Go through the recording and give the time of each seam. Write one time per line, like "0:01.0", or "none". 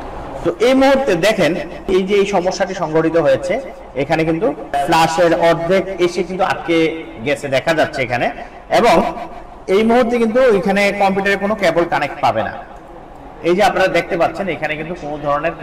0:01.8